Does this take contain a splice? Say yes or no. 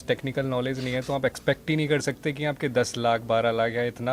no